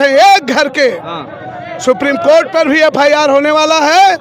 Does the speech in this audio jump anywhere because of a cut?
no; 0 cuts

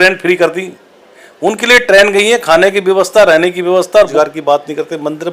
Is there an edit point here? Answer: yes; 1 cut; at 4.1 s

